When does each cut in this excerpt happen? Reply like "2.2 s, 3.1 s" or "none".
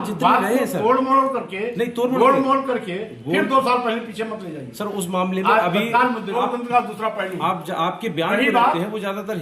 6.4 s

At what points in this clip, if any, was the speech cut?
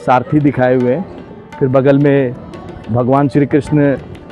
none

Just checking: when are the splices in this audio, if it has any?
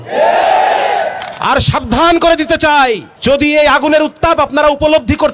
3.1 s

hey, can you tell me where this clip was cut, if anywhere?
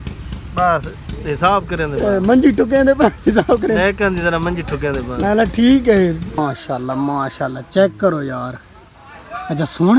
6.4 s

